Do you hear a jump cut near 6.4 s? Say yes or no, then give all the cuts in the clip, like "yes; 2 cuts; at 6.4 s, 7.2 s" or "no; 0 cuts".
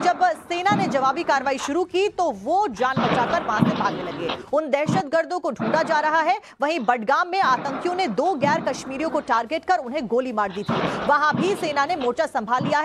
yes; 1 cut; at 6.4 s